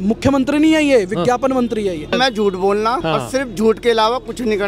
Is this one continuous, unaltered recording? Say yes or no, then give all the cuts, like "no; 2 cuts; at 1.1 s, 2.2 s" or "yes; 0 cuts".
no; 2 cuts; at 2.1 s, 3.0 s